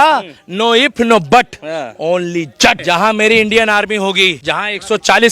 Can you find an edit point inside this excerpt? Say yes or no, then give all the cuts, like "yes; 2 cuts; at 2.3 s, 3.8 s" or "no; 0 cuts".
yes; 2 cuts; at 2.8 s, 4.4 s